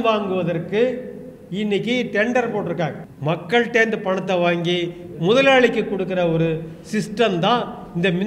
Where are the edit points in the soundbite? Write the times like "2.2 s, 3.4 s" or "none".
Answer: 3.1 s